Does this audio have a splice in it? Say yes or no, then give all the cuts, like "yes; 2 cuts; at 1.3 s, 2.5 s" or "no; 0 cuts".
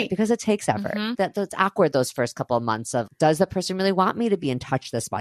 yes; 2 cuts; at 1.2 s, 3.0 s